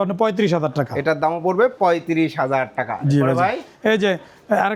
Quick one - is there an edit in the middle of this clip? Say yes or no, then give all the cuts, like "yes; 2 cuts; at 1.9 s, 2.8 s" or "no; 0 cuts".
no; 0 cuts